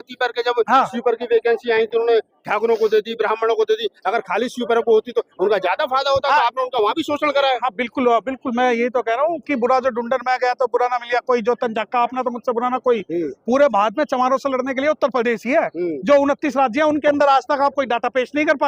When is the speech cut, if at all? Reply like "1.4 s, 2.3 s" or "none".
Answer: none